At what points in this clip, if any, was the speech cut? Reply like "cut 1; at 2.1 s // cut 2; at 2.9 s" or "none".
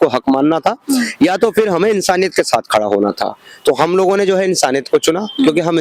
none